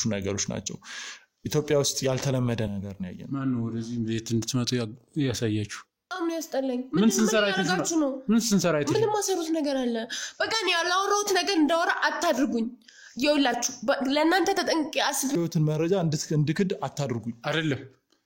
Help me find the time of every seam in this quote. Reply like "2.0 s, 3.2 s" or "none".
6.1 s, 15.4 s